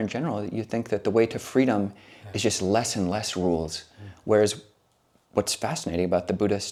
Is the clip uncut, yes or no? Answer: yes